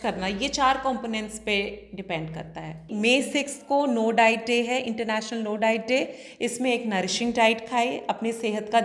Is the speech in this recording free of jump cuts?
no; 1 cut; at 2.9 s

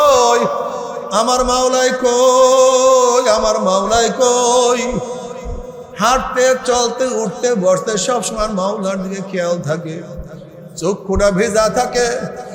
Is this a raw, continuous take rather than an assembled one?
yes; 0 cuts

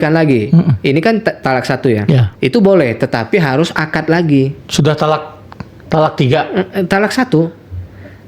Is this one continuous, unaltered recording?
no; 2 cuts; at 2.3 s, 4.6 s

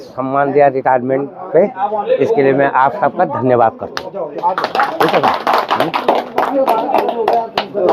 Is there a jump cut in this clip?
no; 0 cuts

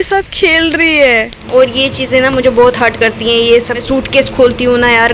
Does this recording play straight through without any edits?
no; 2 cuts; at 1.3 s, 3.8 s

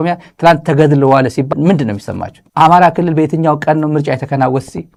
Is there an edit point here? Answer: no; 0 cuts

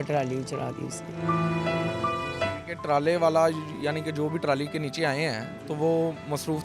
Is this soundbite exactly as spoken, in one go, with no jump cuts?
yes; 0 cuts

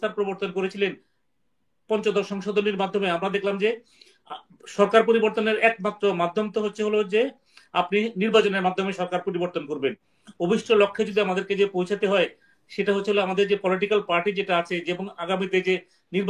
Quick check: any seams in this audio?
yes; 1 cut; at 10.1 s

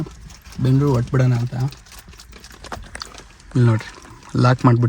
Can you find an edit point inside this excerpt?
no; 0 cuts

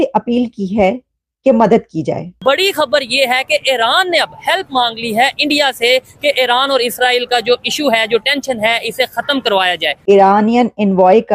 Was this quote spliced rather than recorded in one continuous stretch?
yes; 2 cuts; at 2.4 s, 9.9 s

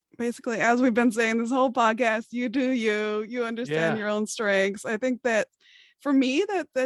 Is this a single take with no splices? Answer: yes; 0 cuts

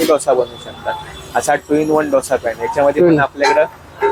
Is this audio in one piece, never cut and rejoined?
yes; 0 cuts

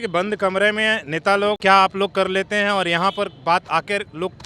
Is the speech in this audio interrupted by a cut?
yes; 1 cut; at 1.6 s

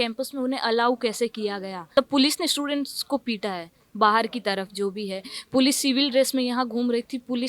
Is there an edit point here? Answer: yes; 1 cut; at 1.9 s

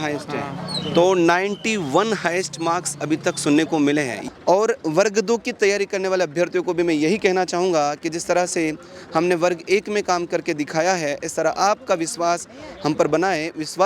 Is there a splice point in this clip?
yes; 1 cut; at 4.2 s

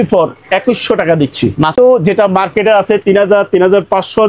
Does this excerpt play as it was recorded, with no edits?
no; 1 cut; at 1.7 s

